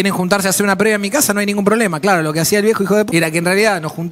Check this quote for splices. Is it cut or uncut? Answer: cut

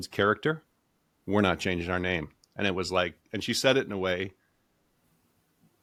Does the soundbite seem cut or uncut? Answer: uncut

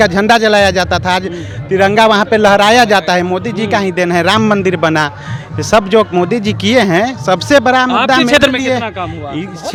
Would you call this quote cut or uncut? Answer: uncut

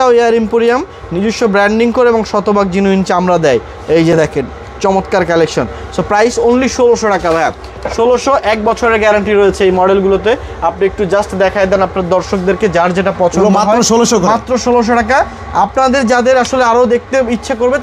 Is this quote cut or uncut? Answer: uncut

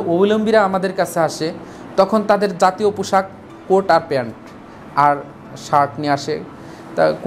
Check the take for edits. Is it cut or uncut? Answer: uncut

